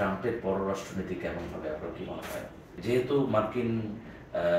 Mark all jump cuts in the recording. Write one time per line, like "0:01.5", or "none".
0:02.8